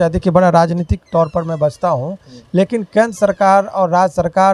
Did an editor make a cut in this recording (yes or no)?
no